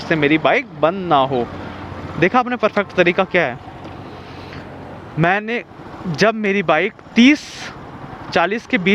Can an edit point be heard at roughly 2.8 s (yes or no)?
no